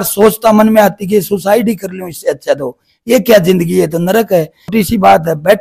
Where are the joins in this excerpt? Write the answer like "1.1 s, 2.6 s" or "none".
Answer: 4.7 s